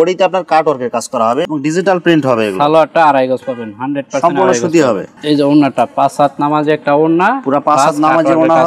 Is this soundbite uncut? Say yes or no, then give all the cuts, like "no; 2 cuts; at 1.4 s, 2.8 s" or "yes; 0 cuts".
yes; 0 cuts